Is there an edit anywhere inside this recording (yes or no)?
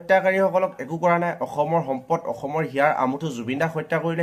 no